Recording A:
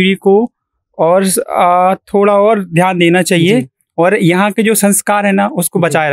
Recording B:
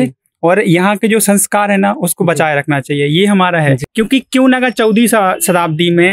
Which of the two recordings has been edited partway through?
B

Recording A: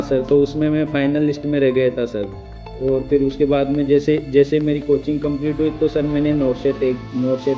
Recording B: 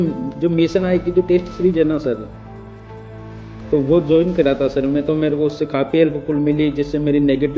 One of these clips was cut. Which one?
A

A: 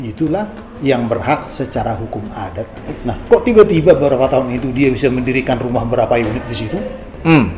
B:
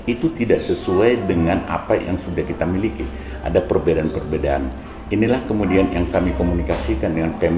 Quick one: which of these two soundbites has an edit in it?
A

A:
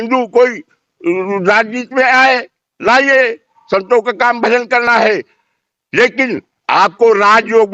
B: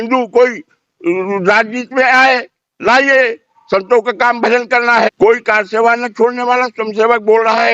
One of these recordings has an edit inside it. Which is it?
B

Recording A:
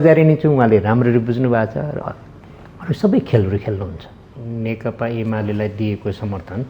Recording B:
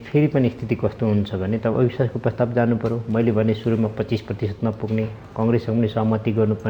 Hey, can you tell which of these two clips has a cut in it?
A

